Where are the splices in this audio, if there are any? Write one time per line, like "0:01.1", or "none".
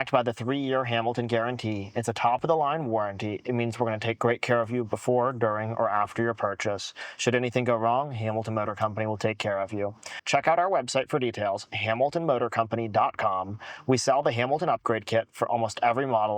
0:10.1